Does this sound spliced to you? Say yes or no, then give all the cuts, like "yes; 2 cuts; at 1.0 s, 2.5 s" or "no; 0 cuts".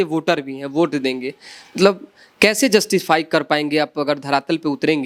no; 0 cuts